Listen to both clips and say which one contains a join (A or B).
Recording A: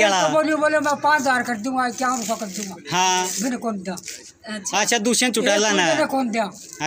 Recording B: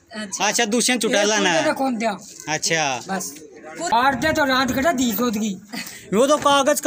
B